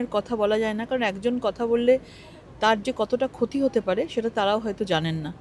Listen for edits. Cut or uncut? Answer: uncut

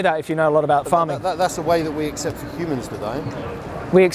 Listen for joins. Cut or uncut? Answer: uncut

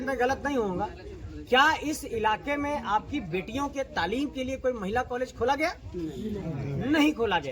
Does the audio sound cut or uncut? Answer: uncut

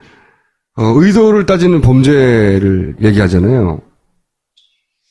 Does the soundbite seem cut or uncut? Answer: cut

